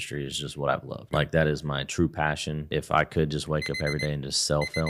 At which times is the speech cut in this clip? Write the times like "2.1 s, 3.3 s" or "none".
1.0 s, 2.7 s